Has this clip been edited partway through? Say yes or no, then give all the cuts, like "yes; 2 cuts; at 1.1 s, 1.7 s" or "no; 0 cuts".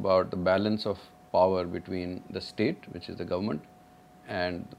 no; 0 cuts